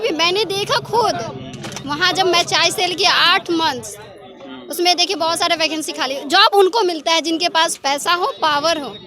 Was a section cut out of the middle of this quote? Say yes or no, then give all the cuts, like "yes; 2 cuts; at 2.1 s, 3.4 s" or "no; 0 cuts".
no; 0 cuts